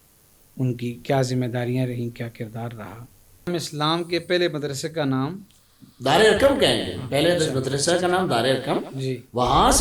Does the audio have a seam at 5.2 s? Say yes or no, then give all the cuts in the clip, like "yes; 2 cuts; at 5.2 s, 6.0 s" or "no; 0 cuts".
no; 1 cut; at 3.5 s